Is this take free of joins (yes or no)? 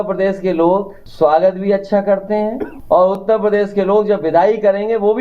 no